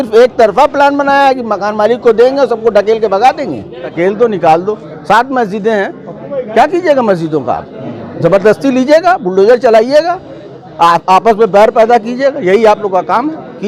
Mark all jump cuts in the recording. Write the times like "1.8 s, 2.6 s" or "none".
3.9 s